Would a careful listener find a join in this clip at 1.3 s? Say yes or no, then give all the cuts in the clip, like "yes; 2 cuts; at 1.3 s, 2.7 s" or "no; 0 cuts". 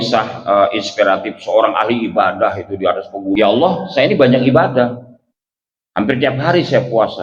no; 1 cut; at 3.4 s